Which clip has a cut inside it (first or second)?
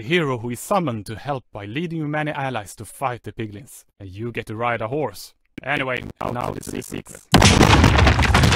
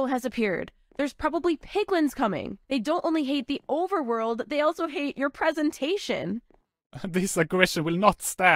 first